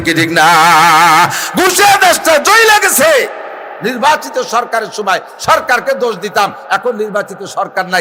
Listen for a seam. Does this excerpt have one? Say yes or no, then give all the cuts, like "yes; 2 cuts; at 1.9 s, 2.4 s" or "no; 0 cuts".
no; 0 cuts